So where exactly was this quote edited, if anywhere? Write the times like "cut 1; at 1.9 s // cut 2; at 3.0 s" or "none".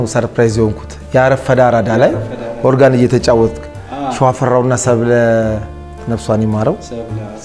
none